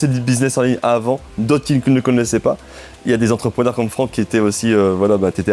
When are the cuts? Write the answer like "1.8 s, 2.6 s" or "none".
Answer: none